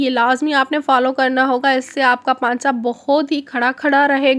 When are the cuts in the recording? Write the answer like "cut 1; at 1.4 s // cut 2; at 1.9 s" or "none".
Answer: none